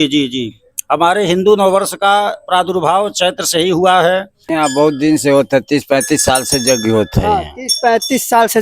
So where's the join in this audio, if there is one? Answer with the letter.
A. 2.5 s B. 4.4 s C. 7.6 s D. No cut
B